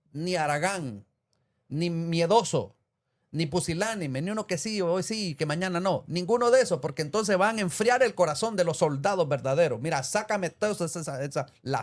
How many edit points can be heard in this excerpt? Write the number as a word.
zero